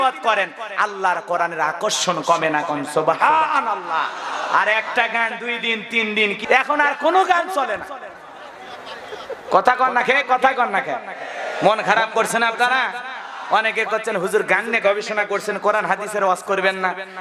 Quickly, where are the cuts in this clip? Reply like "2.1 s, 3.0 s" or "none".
none